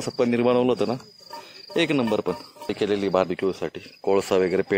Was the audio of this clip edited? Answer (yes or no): yes